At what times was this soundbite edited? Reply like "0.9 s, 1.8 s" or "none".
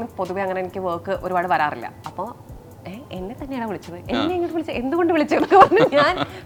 none